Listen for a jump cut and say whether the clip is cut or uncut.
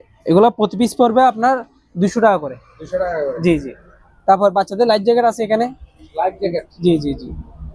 uncut